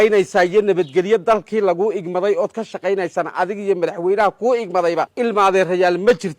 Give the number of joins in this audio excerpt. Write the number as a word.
one